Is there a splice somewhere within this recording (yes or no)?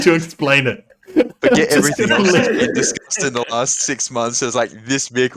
no